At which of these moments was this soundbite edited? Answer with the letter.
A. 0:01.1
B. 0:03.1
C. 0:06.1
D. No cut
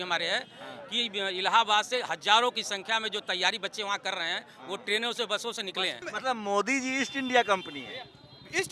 C